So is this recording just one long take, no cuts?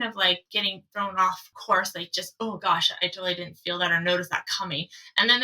no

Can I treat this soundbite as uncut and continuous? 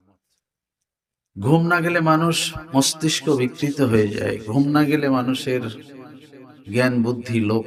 yes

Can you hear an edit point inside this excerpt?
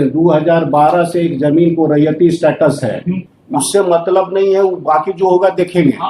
yes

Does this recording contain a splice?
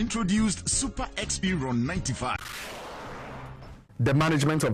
yes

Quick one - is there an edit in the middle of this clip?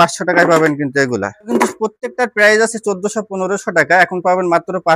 yes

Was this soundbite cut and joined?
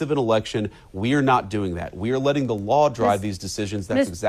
no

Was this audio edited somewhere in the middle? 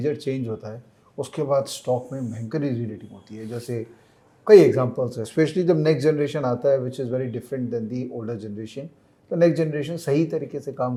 no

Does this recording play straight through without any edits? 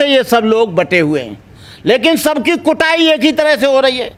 yes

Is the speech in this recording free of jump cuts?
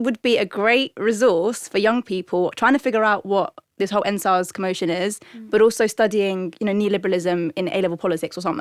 yes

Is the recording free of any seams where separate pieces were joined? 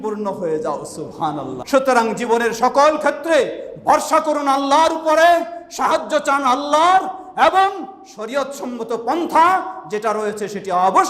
no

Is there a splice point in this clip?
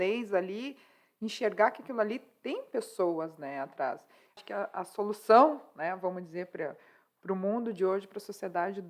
yes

